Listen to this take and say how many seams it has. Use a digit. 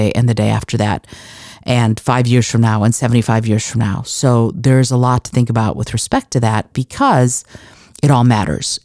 0